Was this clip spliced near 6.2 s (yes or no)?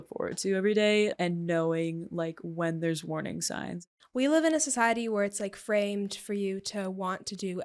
no